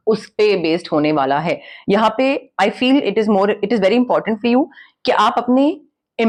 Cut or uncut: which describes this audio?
uncut